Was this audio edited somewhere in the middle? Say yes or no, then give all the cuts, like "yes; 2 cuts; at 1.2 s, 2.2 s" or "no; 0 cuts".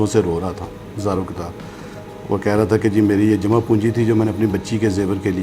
no; 0 cuts